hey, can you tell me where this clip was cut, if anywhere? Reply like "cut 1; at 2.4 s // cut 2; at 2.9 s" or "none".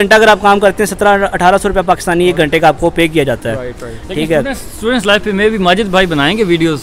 none